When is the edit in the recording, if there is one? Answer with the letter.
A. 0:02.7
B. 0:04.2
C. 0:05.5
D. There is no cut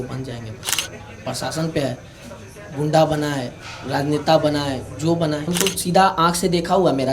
C